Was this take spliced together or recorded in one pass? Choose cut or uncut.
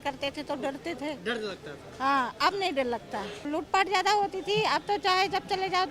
cut